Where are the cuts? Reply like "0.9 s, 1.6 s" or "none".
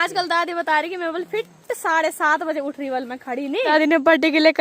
3.7 s